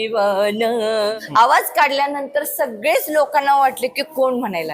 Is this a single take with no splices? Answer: no; 1 cut; at 1.1 s

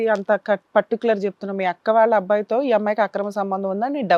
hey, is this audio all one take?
yes; 0 cuts

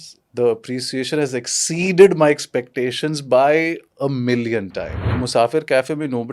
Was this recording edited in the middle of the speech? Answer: yes; 1 cut; at 5.0 s

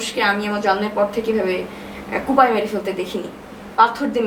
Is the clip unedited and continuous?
yes; 0 cuts

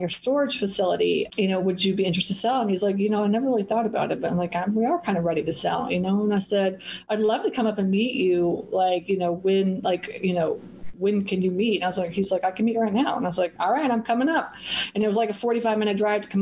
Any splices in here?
yes; 1 cut; at 1.3 s

